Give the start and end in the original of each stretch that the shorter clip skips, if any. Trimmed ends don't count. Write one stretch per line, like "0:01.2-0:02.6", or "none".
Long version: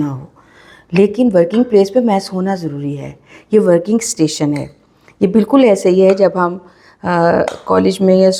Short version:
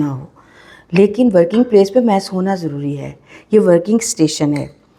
none